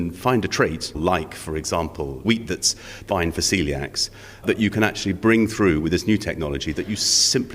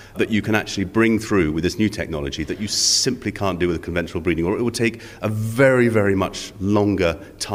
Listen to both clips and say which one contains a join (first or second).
first